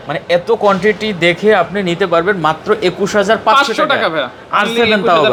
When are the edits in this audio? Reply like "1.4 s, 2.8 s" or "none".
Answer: none